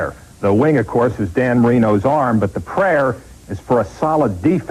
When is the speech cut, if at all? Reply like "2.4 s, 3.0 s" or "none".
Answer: none